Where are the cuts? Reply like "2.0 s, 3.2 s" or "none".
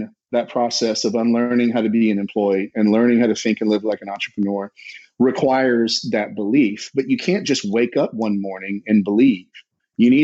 none